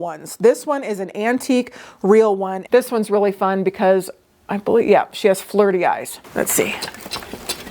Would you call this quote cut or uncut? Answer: cut